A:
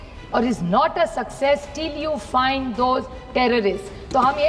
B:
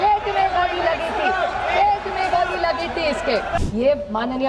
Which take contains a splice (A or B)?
B